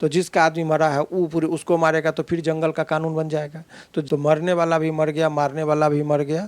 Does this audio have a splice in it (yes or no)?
yes